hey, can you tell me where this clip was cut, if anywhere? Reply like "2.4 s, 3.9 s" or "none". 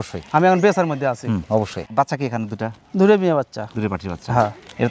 1.8 s